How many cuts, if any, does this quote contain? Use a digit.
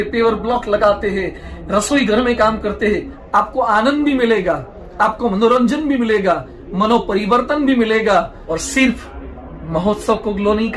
2